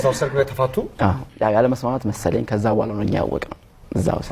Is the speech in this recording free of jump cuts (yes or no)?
no